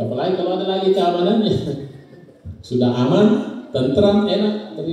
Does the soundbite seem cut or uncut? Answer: uncut